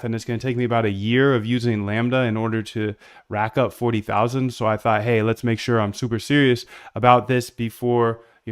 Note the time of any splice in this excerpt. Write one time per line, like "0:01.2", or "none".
0:02.1